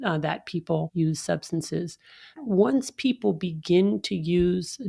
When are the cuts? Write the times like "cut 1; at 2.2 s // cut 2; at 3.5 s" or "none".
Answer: cut 1; at 0.9 s // cut 2; at 2.4 s